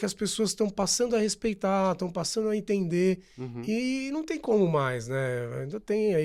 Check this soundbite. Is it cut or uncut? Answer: uncut